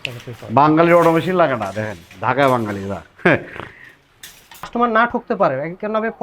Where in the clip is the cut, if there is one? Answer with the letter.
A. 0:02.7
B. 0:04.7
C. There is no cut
B